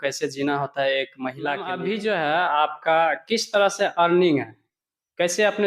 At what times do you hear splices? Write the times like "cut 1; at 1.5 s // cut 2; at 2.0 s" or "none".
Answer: cut 1; at 1.7 s